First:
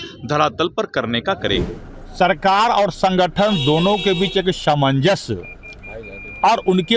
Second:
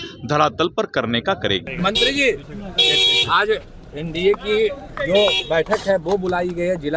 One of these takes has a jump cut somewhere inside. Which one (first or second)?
first